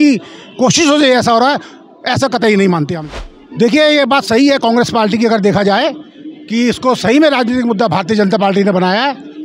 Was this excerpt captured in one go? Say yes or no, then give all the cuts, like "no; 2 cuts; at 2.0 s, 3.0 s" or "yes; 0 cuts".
no; 1 cut; at 2.9 s